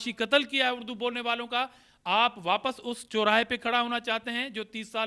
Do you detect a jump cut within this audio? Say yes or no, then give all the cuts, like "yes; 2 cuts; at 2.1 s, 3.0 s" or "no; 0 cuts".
no; 0 cuts